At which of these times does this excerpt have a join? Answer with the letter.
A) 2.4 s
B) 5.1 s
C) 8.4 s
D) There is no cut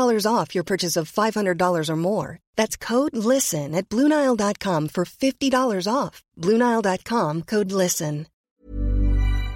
C